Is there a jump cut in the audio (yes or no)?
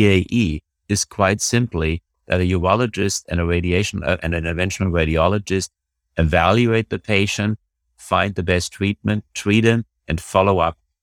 no